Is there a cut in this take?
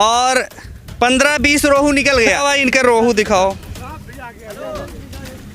yes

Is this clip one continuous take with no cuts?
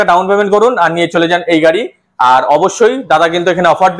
yes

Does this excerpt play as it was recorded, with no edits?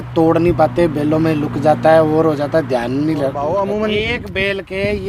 no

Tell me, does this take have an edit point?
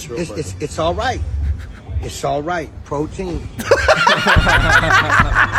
no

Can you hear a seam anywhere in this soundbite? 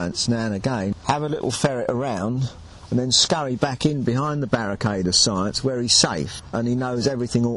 yes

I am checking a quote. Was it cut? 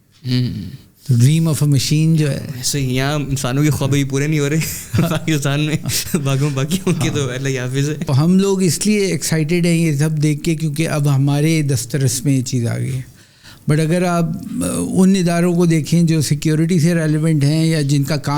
yes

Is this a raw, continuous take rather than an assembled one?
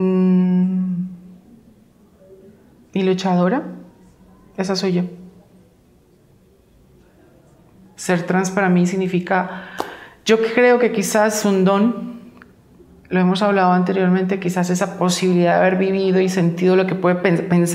yes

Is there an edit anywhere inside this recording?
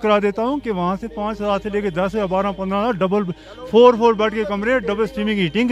no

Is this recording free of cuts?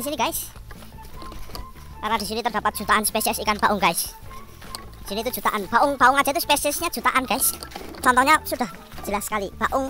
yes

